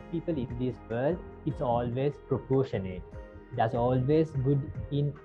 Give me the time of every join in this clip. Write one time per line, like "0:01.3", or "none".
none